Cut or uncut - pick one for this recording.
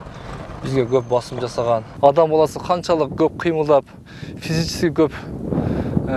cut